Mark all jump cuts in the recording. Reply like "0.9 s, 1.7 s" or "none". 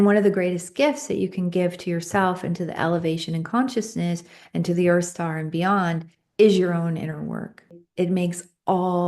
7.8 s